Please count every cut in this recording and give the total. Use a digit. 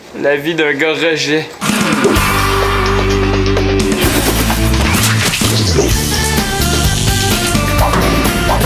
1